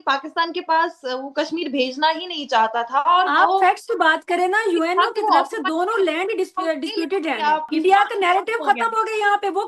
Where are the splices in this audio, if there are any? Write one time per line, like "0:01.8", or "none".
0:07.7